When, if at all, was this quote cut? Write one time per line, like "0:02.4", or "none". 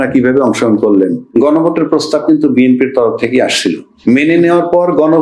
0:01.2
0:03.9